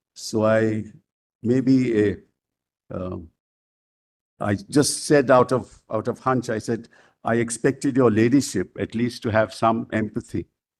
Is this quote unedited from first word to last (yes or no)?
yes